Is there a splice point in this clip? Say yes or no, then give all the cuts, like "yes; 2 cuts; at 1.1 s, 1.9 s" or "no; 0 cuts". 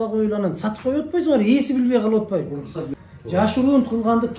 yes; 1 cut; at 2.8 s